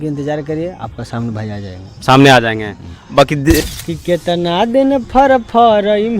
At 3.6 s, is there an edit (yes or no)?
yes